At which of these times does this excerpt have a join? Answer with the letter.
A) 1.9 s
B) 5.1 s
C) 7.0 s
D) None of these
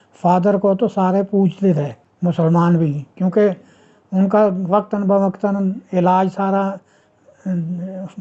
D